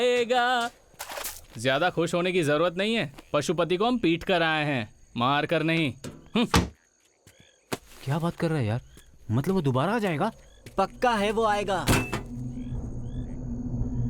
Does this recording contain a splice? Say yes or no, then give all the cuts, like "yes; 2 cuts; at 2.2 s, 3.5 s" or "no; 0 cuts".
yes; 1 cut; at 1.5 s